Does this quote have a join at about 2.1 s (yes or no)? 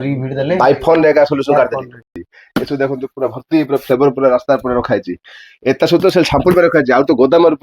yes